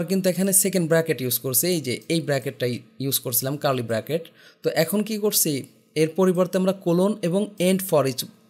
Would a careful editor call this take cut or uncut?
uncut